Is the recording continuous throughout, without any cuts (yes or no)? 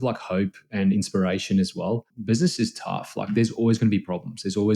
no